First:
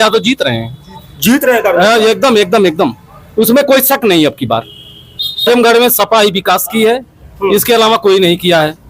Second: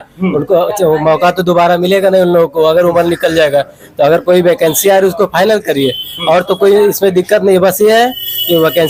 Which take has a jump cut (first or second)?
first